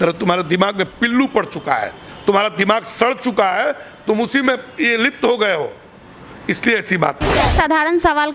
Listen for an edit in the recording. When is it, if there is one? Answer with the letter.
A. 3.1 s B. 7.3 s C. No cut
B